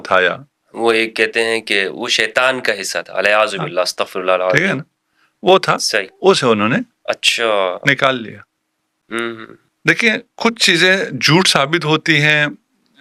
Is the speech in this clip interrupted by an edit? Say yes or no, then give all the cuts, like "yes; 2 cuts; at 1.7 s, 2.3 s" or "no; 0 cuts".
no; 0 cuts